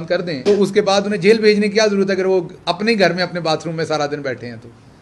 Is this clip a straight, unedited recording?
yes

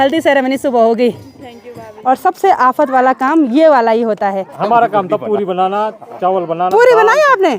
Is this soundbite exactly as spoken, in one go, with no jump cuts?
no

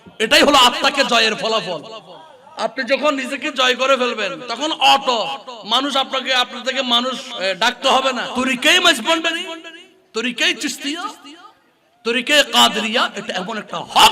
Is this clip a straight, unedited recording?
no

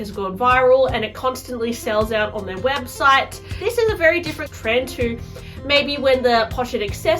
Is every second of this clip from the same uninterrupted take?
no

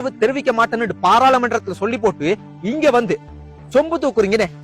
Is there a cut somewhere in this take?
no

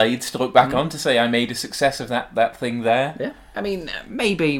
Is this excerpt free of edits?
no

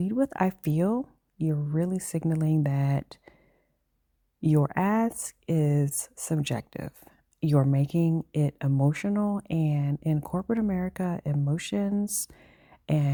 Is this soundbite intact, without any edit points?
yes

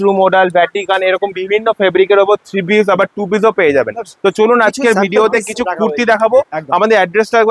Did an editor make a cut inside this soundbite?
no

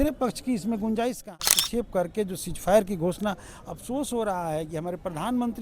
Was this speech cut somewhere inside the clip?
yes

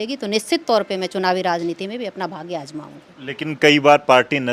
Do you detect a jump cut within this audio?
no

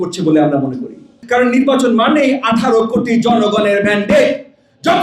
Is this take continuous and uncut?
no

